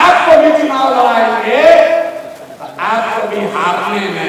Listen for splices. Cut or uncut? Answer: uncut